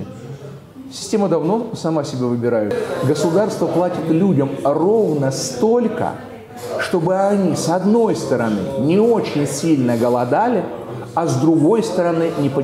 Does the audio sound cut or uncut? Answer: cut